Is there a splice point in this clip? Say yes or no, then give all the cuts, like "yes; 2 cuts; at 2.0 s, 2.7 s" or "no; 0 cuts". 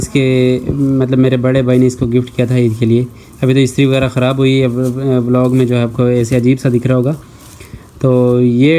no; 0 cuts